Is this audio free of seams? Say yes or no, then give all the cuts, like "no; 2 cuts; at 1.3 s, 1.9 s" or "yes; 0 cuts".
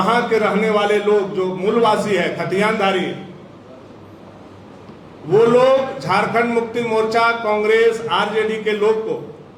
yes; 0 cuts